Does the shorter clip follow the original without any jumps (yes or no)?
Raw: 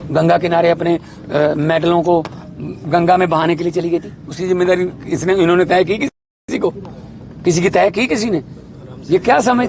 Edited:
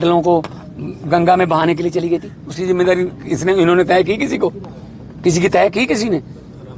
no